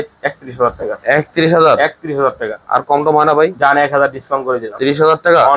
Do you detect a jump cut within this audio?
no; 0 cuts

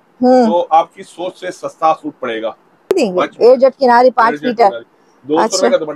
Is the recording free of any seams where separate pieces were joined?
no; 1 cut; at 2.9 s

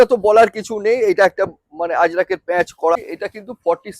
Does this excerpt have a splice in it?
yes; 1 cut; at 3.0 s

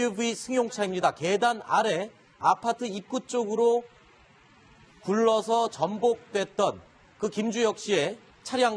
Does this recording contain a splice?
yes; 1 cut; at 3.0 s

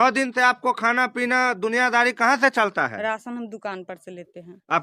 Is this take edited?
no; 0 cuts

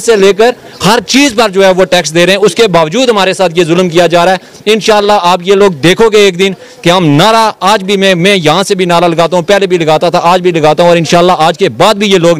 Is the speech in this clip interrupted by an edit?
no; 0 cuts

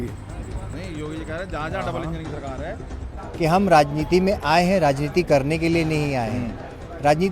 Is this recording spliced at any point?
yes; 1 cut; at 3.1 s

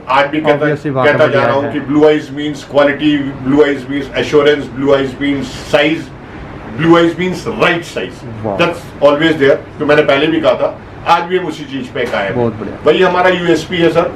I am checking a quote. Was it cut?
no; 0 cuts

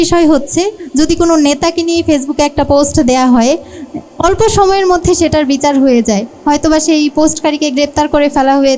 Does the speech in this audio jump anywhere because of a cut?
no; 0 cuts

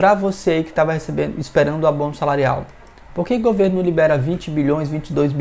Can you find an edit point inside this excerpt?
no; 0 cuts

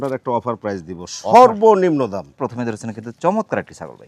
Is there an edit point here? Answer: no; 0 cuts

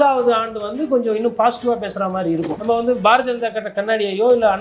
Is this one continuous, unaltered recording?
no; 1 cut; at 2.5 s

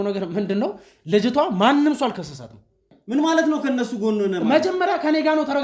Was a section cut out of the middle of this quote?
yes; 1 cut; at 2.9 s

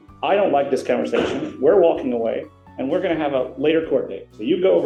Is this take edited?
no; 0 cuts

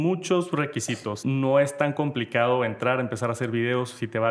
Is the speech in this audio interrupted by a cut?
yes; 1 cut; at 1.1 s

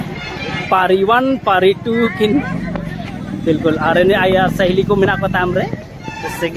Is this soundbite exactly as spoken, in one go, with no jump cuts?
yes; 0 cuts

